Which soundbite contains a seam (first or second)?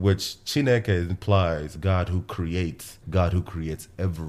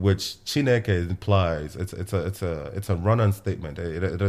first